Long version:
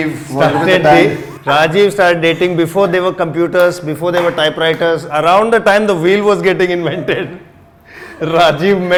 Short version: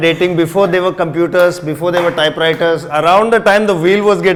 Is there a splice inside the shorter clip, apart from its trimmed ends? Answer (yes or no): no